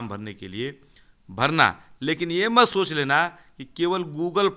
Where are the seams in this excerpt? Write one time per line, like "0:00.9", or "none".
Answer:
none